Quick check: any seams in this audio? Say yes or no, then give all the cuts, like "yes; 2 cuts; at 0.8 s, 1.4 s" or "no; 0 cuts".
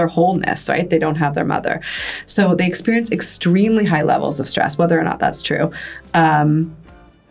no; 0 cuts